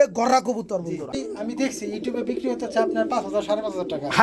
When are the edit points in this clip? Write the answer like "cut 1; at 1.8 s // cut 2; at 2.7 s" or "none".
cut 1; at 1.2 s